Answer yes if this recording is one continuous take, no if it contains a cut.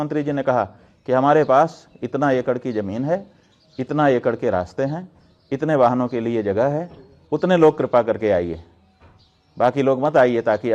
yes